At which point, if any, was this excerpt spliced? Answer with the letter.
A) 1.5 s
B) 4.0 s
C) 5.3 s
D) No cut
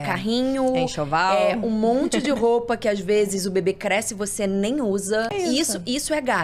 C